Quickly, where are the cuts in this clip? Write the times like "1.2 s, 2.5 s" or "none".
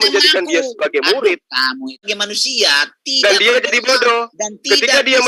2.1 s